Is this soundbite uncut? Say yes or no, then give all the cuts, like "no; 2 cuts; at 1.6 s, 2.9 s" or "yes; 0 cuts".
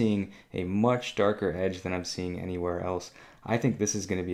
yes; 0 cuts